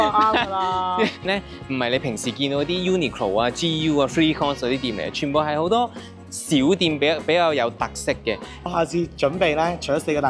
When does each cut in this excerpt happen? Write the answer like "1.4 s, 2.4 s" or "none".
1.2 s, 8.5 s